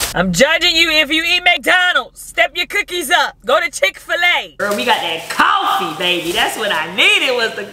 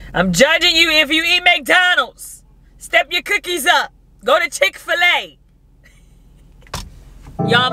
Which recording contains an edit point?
first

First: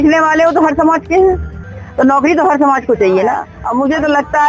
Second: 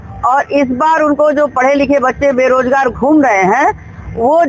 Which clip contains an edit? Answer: first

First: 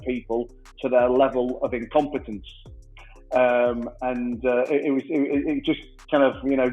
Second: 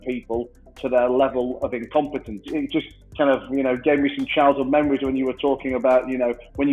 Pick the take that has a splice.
second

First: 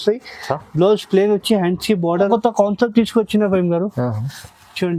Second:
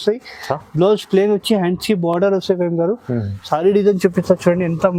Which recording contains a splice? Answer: first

